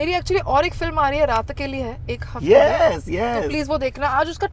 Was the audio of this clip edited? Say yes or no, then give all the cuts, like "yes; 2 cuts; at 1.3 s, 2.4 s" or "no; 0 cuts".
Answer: no; 0 cuts